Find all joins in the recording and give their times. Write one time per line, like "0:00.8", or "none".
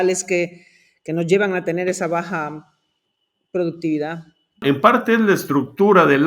0:04.6